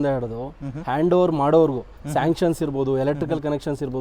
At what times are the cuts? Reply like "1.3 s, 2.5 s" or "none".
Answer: none